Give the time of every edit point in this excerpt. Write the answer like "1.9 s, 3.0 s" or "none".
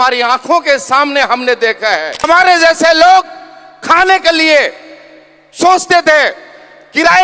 2.2 s